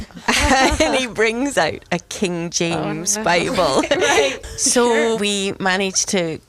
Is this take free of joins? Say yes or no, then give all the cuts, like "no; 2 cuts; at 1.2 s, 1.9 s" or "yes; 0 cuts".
no; 2 cuts; at 4.4 s, 5.2 s